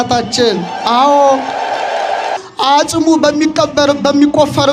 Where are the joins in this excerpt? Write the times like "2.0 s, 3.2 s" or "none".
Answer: 2.4 s